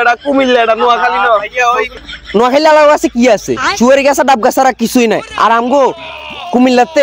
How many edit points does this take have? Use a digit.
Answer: 1